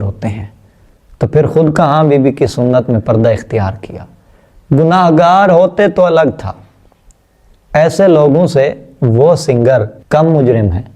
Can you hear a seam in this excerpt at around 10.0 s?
yes; 1 cut; at 10.0 s

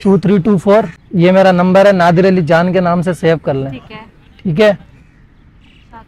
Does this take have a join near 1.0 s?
yes; 1 cut; at 1.0 s

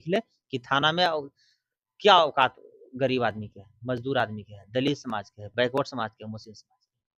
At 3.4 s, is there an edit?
no; 0 cuts

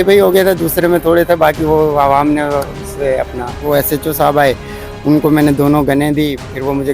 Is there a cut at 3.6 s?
yes; 1 cut; at 3.6 s

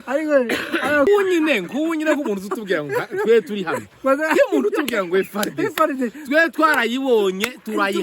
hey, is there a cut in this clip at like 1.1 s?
yes; 1 cut; at 1.1 s

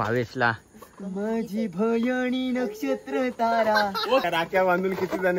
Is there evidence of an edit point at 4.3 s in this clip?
yes; 1 cut; at 4.3 s

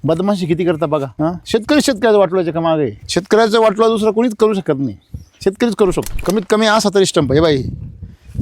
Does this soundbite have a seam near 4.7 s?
no; 3 cuts; at 1.1 s, 3.0 s, 6.1 s

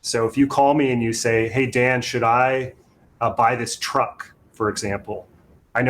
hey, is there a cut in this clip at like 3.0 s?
no; 0 cuts

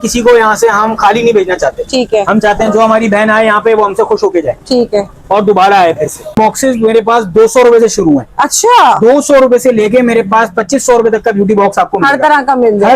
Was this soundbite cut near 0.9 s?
no; 1 cut; at 6.3 s

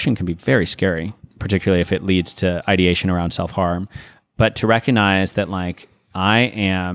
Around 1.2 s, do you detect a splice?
yes; 1 cut; at 1.2 s

